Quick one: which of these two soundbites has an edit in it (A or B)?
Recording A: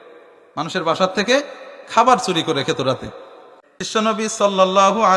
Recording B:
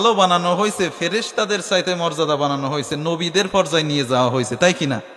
A